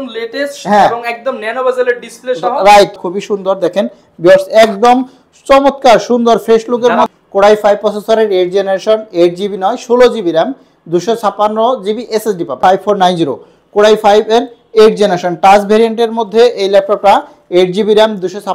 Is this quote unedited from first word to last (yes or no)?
no